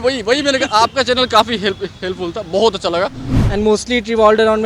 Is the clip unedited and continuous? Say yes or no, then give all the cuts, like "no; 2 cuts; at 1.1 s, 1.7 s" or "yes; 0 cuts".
no; 1 cut; at 3.2 s